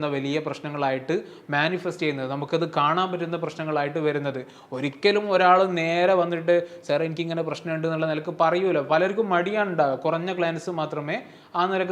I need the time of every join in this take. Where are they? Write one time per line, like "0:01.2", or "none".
none